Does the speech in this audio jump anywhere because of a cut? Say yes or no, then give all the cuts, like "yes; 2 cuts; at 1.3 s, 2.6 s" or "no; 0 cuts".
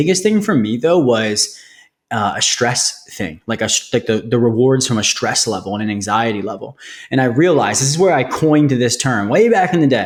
no; 0 cuts